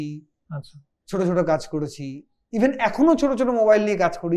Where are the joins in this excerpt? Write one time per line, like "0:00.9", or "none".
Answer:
none